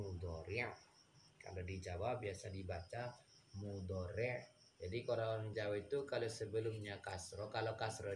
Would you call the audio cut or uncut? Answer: uncut